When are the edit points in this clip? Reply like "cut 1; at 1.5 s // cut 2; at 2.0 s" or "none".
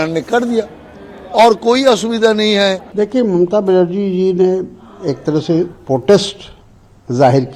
none